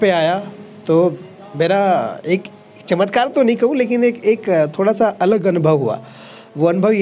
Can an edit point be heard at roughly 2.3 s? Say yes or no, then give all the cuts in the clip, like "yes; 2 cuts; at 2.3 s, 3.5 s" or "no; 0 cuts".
no; 0 cuts